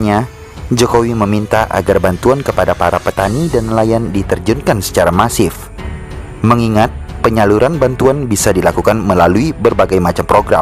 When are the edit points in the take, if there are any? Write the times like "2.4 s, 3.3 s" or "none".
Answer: none